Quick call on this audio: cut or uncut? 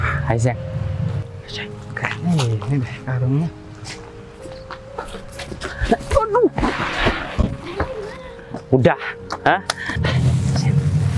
cut